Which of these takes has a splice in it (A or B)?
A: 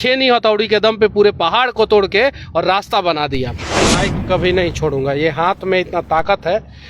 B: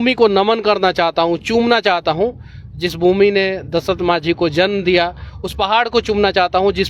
A